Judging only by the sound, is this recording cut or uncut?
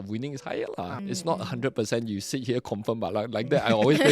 cut